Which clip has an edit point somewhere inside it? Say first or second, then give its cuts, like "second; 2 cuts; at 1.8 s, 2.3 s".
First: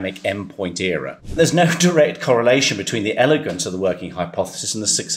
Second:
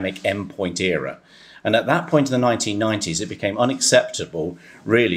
first; 1 cut; at 1.4 s